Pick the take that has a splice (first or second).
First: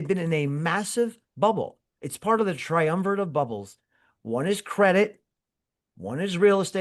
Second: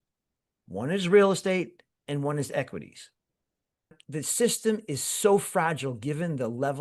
second